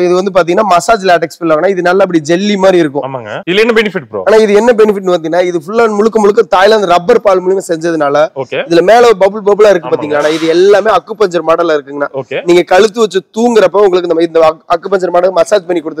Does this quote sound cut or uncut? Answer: uncut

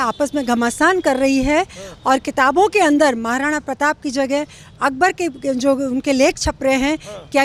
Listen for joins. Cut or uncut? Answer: uncut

